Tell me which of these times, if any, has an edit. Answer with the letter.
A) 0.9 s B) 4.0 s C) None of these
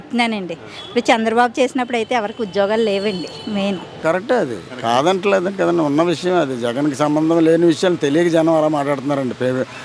B